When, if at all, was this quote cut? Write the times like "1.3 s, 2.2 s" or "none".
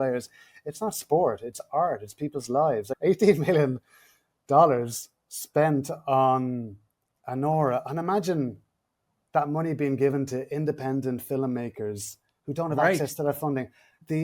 2.9 s